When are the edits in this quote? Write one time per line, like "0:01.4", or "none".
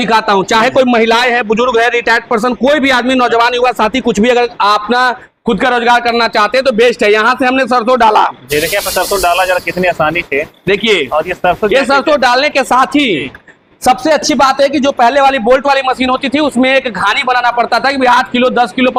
none